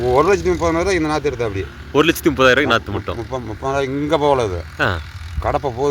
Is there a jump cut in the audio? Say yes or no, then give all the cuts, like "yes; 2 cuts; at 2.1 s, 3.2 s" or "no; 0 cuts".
no; 0 cuts